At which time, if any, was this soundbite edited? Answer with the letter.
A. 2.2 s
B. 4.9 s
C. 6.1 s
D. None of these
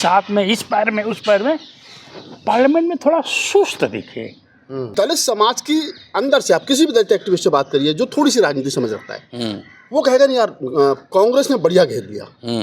B